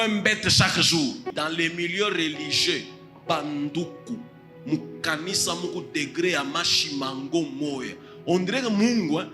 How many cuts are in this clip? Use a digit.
1